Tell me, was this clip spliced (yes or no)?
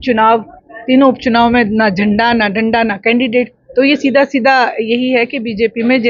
no